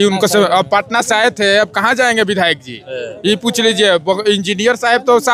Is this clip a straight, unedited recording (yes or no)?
yes